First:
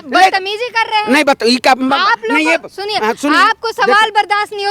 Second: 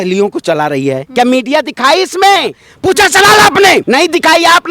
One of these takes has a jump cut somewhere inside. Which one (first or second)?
second